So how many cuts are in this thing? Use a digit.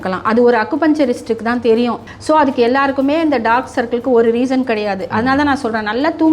1